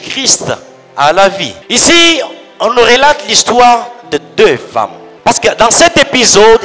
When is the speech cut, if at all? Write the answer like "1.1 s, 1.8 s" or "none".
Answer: 1.5 s, 5.0 s